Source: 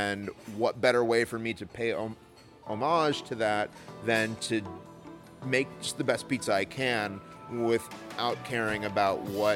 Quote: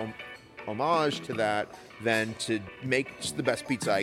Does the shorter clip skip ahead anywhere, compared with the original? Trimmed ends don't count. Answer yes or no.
yes